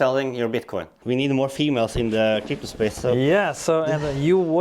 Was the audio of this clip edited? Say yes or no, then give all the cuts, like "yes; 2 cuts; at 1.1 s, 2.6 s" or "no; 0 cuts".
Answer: yes; 1 cut; at 0.9 s